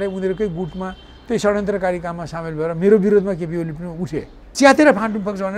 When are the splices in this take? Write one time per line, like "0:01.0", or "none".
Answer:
0:04.5